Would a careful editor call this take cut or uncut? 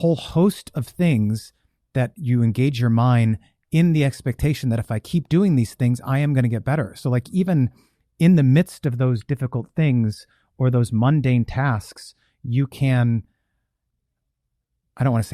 uncut